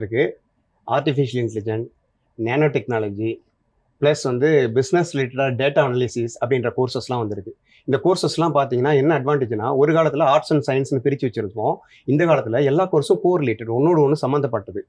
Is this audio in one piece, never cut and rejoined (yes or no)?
yes